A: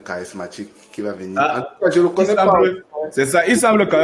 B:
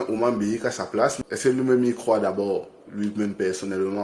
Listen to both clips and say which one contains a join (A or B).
B